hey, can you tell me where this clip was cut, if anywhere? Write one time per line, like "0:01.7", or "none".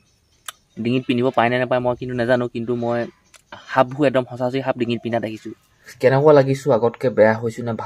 0:05.9